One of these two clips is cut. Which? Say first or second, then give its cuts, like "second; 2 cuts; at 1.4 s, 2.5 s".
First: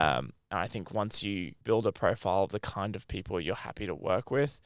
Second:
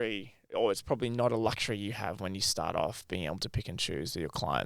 first; 1 cut; at 1.5 s